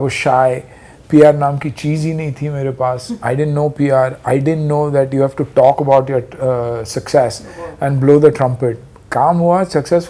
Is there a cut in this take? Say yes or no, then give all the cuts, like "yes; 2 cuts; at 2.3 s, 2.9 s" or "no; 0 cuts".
no; 0 cuts